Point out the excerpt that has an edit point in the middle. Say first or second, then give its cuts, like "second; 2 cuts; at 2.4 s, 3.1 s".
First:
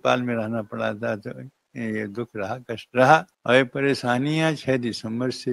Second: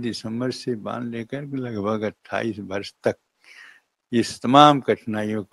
first; 1 cut; at 3.3 s